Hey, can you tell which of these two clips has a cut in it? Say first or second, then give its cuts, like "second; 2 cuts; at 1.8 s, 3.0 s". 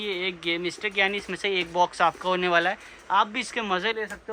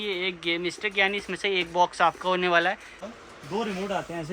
second; 1 cut; at 2.9 s